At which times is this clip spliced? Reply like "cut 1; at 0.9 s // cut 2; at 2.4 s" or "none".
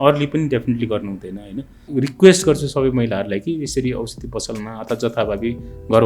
cut 1; at 1.9 s